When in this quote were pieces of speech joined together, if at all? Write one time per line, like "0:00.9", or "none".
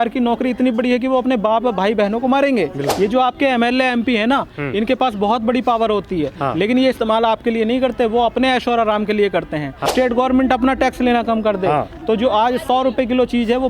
0:02.9
0:09.9